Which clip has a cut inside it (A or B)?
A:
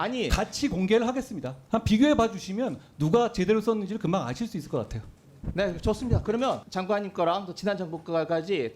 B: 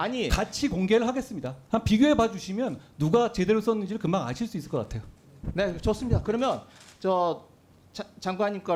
A